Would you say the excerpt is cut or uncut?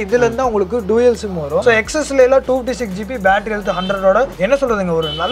cut